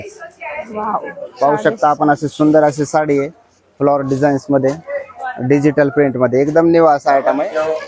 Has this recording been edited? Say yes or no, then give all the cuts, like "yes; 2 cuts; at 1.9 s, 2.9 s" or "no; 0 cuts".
no; 0 cuts